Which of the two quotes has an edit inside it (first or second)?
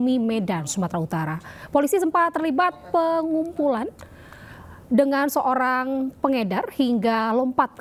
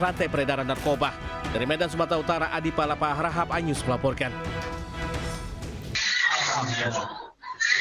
second